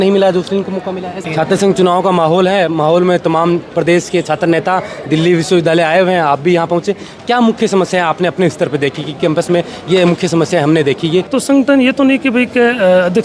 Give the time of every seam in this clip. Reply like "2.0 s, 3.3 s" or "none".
1.2 s, 11.3 s